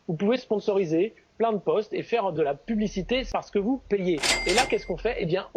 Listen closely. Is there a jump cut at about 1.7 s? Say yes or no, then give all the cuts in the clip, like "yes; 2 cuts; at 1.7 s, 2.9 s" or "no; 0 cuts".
no; 2 cuts; at 3.3 s, 4.3 s